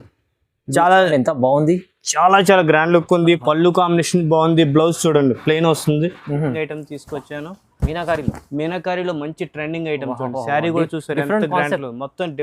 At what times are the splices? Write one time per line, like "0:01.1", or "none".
0:06.5